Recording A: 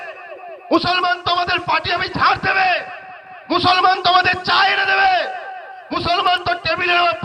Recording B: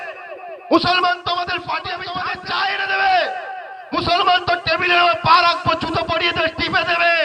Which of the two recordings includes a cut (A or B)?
B